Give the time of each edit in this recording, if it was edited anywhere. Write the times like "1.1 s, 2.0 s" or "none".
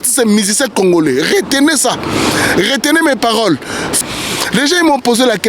3.9 s